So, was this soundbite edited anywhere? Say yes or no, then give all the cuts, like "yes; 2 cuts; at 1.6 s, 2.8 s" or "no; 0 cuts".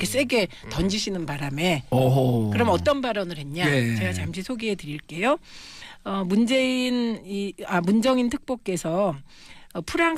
yes; 1 cut; at 8.5 s